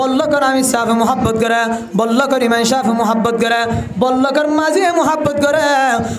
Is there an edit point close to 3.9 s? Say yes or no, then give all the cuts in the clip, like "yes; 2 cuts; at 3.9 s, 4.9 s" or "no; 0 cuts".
no; 0 cuts